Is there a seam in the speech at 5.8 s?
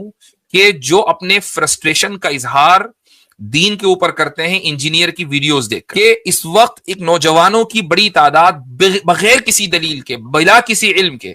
yes; 1 cut; at 5.8 s

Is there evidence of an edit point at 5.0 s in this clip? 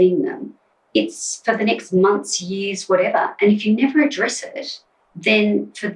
no; 0 cuts

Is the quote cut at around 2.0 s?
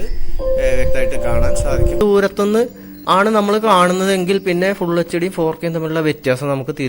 yes; 1 cut; at 2.0 s

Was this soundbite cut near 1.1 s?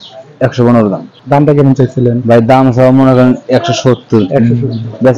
yes; 1 cut; at 1.1 s

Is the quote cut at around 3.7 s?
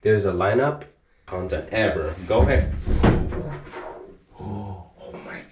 no; 1 cut; at 1.3 s

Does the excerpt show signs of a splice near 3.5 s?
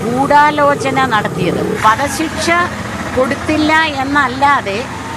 no; 1 cut; at 1.8 s

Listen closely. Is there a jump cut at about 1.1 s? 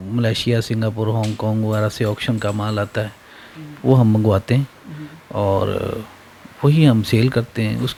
no; 0 cuts

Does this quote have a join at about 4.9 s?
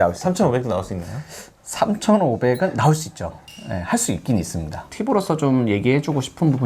yes; 1 cut; at 4.9 s

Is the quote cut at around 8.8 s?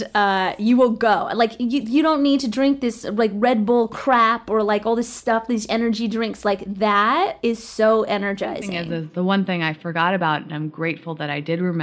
yes; 1 cut; at 8.8 s

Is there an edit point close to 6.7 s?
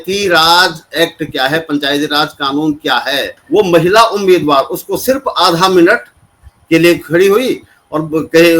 no; 1 cut; at 3.3 s

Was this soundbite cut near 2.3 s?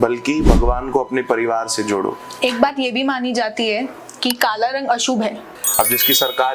yes; 2 cuts; at 2.3 s, 5.5 s

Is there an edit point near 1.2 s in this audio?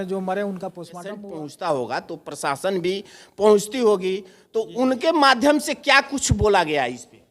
yes; 1 cut; at 1.2 s

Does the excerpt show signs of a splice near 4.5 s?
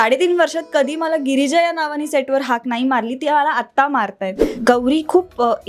yes; 1 cut; at 4.5 s

